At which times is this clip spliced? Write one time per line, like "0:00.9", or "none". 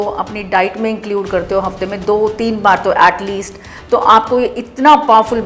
none